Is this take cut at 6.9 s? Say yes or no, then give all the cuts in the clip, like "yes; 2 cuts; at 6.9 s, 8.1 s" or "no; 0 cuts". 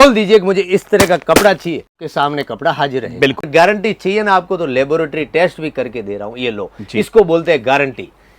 no; 2 cuts; at 2.0 s, 3.5 s